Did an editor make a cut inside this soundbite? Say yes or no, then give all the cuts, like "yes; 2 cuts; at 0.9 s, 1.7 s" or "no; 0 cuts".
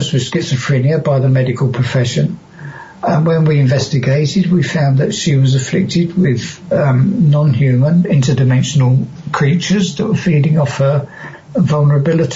no; 0 cuts